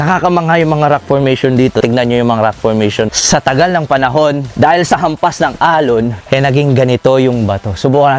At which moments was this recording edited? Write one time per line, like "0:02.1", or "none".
0:01.8
0:03.2
0:04.5
0:06.2